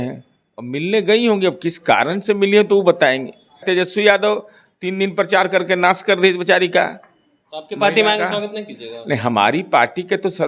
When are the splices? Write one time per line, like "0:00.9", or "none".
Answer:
0:03.6